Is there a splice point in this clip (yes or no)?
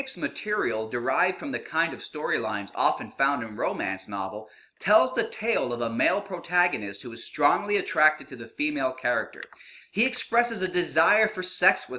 no